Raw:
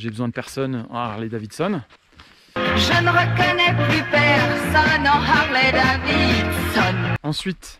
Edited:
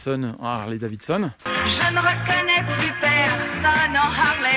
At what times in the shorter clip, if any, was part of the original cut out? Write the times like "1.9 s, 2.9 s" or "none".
1.4 s